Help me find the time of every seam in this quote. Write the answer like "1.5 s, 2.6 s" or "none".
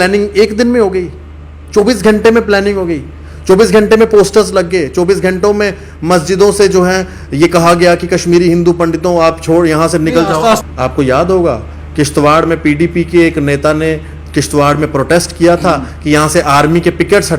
10.6 s

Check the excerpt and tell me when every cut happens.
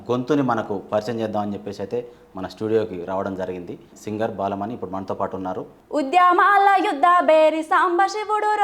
3.9 s, 5.7 s

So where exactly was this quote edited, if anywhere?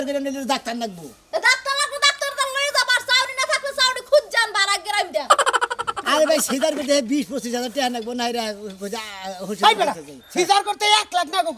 6.1 s

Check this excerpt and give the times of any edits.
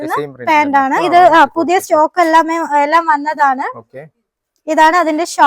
1.0 s

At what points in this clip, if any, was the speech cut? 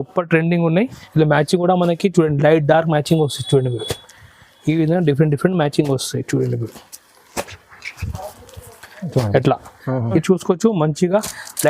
1.0 s, 10.2 s

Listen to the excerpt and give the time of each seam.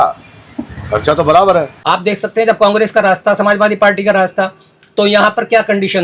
1.8 s

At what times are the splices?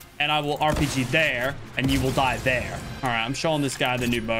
2.9 s

